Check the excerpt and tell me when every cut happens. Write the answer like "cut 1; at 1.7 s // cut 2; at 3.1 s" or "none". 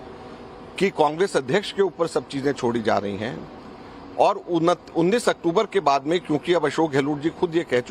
cut 1; at 4.1 s